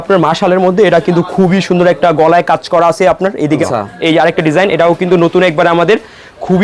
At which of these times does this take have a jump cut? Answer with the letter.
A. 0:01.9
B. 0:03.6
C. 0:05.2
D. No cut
B